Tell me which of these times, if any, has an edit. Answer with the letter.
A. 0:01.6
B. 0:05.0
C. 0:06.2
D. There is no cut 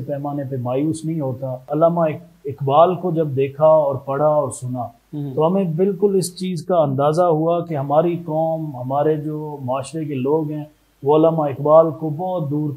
A